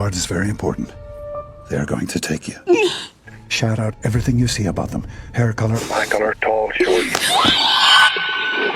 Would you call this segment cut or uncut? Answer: cut